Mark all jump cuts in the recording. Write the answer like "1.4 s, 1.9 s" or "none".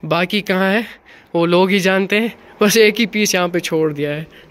none